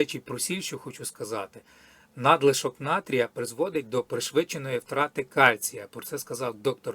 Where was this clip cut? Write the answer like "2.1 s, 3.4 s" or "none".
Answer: none